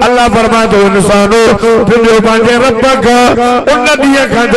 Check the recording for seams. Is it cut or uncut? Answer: uncut